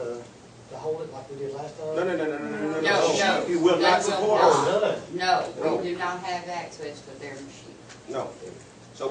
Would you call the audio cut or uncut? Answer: cut